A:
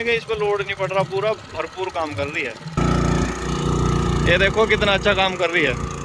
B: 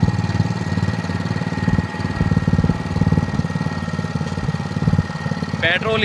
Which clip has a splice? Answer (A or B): A